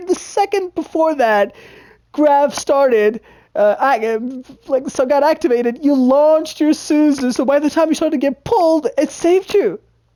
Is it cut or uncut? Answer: uncut